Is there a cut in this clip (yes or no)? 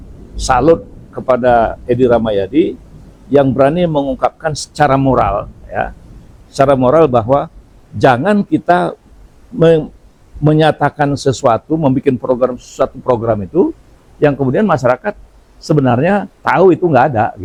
no